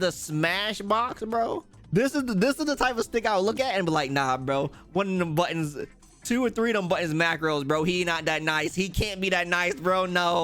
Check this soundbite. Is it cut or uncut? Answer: cut